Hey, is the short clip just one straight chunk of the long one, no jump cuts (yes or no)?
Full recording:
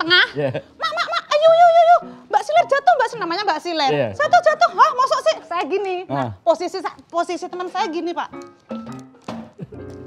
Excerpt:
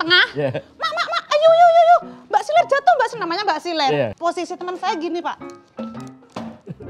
no